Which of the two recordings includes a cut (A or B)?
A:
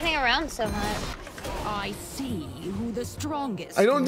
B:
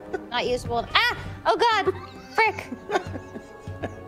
A